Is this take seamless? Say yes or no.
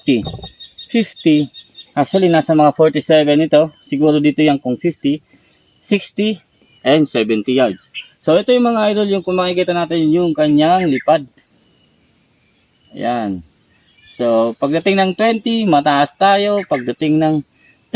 yes